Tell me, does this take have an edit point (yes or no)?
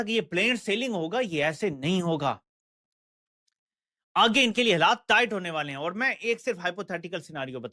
no